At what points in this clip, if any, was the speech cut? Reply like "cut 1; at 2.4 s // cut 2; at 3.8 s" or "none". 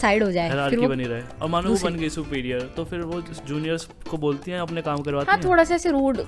cut 1; at 1.3 s